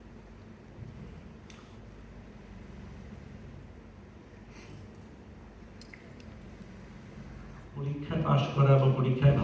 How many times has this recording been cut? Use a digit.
1